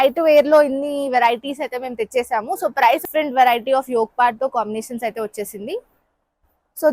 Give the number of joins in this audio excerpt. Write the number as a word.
one